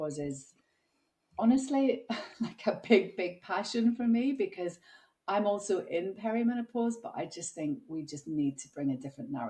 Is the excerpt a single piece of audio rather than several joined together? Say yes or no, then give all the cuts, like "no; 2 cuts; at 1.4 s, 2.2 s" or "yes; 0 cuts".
yes; 0 cuts